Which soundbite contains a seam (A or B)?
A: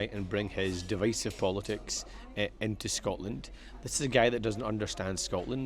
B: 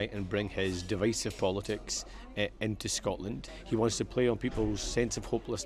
B